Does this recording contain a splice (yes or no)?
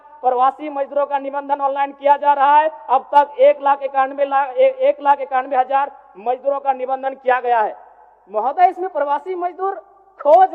no